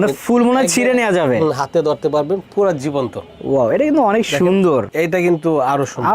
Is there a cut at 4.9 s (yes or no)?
yes